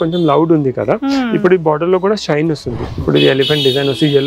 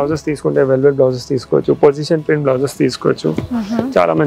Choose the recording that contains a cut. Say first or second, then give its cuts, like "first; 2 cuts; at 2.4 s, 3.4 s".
first; 1 cut; at 2.7 s